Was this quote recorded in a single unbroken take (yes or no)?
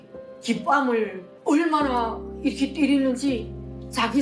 no